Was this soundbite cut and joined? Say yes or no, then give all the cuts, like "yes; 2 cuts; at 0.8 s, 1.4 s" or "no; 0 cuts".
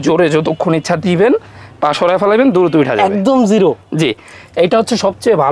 no; 0 cuts